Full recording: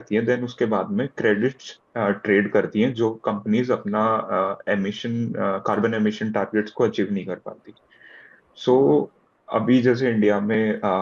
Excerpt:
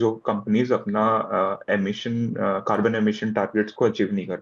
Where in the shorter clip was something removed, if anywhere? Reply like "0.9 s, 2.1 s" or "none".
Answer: none

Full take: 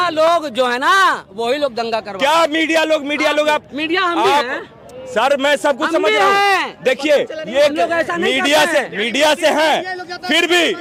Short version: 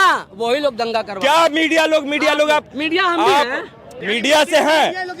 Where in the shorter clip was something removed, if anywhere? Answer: 4.0 s

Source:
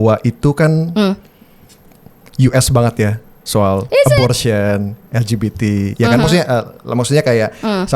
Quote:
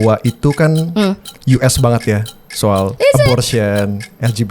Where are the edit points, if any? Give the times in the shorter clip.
1.3 s

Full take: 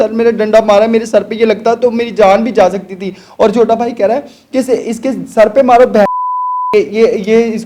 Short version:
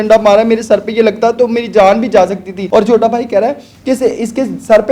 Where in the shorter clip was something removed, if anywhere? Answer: 2.5 s

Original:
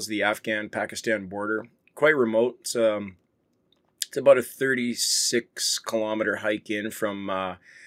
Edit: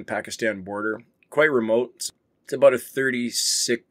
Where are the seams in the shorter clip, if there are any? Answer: 2.0 s

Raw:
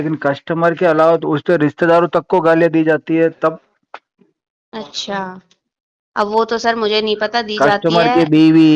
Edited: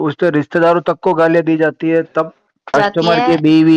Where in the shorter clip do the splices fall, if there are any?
2.6 s

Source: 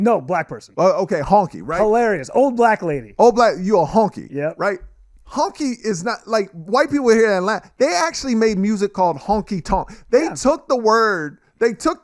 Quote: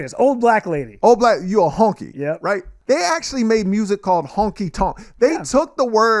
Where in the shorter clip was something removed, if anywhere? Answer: 2.7 s

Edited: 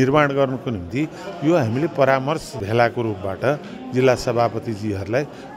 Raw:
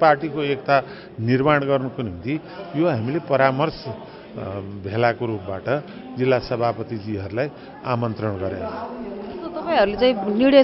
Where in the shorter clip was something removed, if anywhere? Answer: 2.5 s

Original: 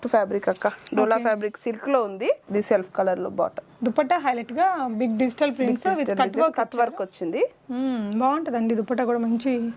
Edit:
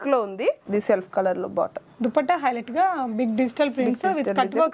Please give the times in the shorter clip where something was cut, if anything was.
none

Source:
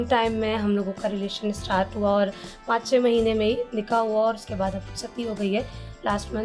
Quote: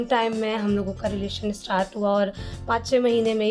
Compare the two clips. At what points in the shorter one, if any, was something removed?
none

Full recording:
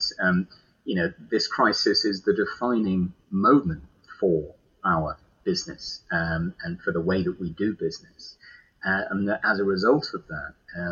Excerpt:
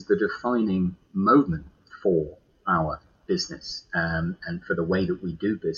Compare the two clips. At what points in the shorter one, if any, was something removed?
none

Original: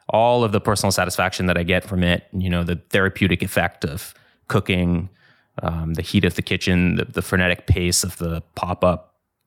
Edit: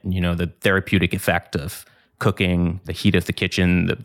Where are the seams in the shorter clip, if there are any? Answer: 2.9 s

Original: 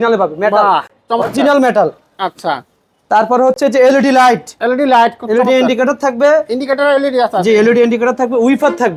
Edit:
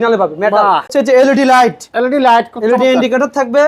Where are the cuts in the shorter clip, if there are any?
0.9 s

